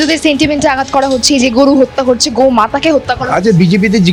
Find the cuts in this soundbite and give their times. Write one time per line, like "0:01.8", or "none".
none